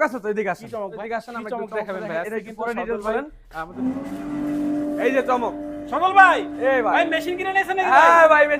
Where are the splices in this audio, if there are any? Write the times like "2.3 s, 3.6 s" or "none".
1.0 s, 3.7 s